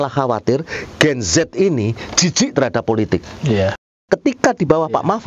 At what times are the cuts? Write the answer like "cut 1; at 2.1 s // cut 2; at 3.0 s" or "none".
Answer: cut 1; at 4.0 s